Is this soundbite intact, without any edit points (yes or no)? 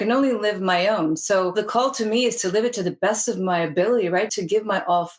no